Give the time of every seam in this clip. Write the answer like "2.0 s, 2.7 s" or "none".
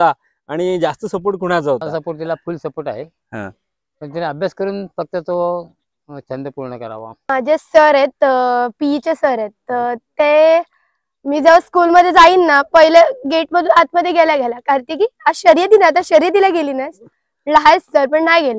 2.1 s, 7.3 s